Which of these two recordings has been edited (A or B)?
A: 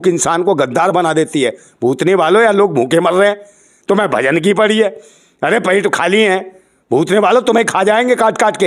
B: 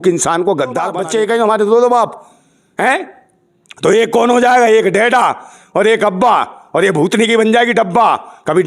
B